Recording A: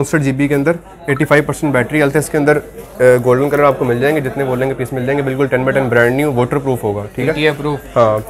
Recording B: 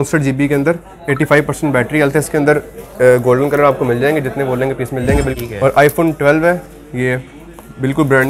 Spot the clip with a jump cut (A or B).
B